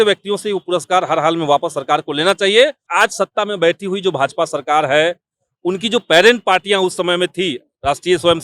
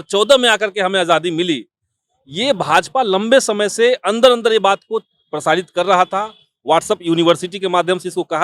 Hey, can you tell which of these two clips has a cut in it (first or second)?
first